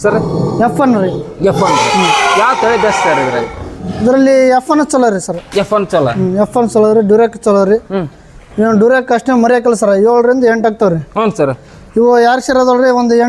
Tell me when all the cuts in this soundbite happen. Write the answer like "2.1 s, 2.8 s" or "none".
none